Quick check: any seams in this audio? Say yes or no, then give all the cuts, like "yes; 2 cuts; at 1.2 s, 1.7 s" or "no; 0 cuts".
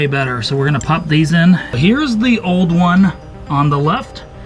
yes; 1 cut; at 1.7 s